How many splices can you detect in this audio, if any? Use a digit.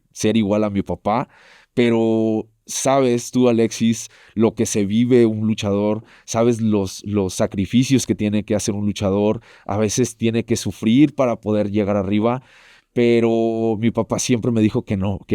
0